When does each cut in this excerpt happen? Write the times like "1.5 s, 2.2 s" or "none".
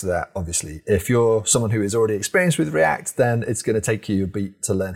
none

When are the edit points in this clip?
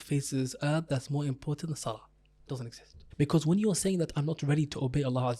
3.0 s

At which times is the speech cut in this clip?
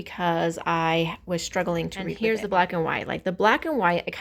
2.1 s

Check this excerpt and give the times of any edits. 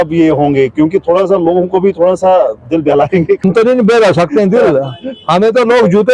3.4 s

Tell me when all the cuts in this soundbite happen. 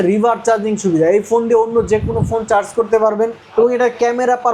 3.4 s

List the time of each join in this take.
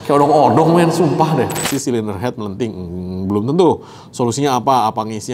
1.6 s

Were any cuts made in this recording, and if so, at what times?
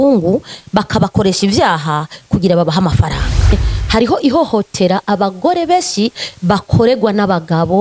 3.7 s

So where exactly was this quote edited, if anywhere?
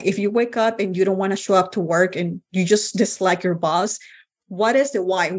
none

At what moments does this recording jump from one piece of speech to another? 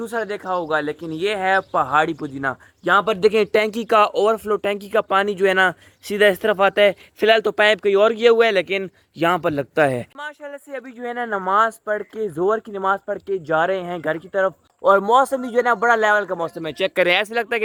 none

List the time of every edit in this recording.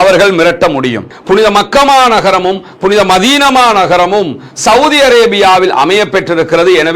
1.1 s

